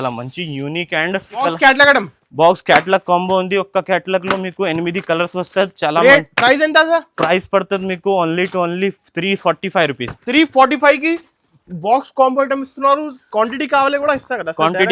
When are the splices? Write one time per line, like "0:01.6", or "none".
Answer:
0:01.5

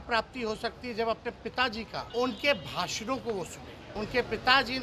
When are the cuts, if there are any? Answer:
0:02.1
0:03.8

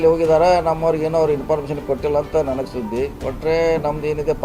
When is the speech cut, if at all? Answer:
none

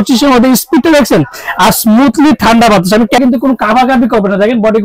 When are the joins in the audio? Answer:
0:03.2

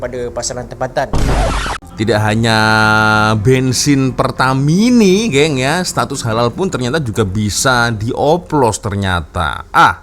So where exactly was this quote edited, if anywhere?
0:01.3

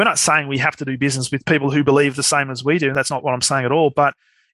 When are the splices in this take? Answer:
none

